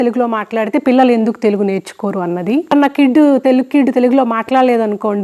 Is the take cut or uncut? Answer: cut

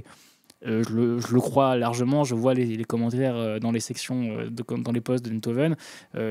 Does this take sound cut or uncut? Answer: uncut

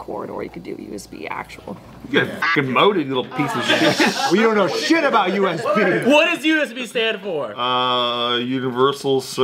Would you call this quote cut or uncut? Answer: cut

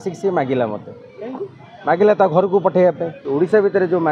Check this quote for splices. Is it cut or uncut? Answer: cut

